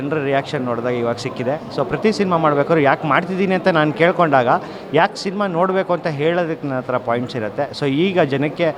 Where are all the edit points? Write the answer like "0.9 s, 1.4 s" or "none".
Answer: none